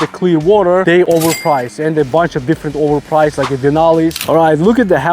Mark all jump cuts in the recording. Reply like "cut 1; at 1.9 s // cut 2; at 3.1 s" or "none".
cut 1; at 0.9 s // cut 2; at 4.2 s